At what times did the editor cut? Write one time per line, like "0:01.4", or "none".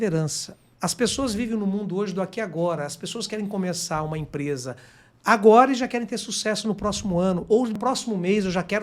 0:07.8